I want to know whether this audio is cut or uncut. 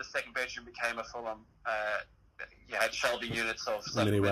uncut